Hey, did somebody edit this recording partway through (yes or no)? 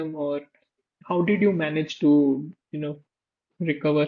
no